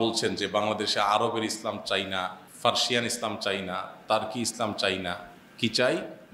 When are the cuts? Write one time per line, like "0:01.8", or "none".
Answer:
0:02.4